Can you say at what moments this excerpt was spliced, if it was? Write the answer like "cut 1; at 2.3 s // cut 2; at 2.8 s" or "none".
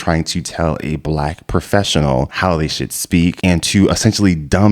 cut 1; at 2.3 s // cut 2; at 3.4 s